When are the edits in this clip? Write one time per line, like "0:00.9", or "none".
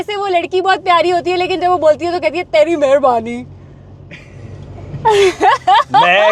none

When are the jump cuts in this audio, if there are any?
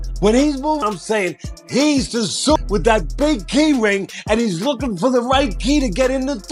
0:00.8
0:02.6

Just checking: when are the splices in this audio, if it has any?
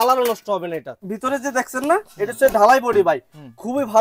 0:00.9

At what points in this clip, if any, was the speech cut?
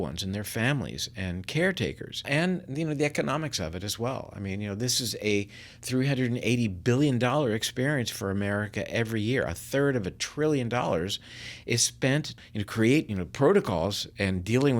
0:02.2
0:12.4
0:13.1

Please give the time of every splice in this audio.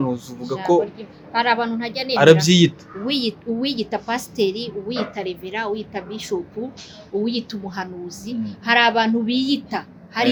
none

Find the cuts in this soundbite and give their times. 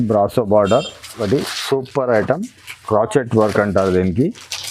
0:01.2

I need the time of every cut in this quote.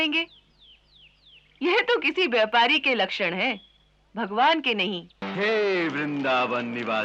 0:05.2

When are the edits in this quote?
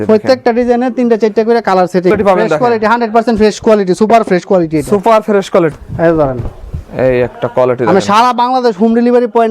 0:02.1
0:05.7

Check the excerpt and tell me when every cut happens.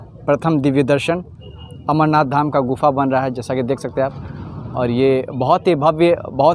none

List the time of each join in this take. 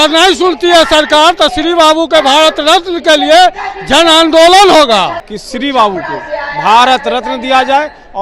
0:05.3

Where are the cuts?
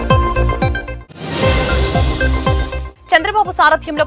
none

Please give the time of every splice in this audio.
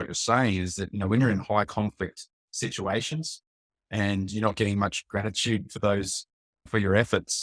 none

